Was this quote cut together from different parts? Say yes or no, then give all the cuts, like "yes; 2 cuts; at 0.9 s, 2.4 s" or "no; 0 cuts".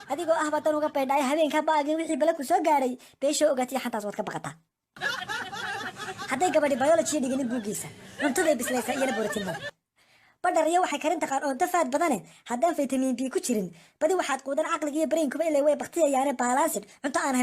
yes; 1 cut; at 11.4 s